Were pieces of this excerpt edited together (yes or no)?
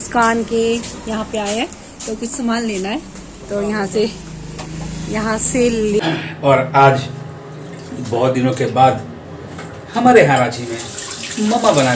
yes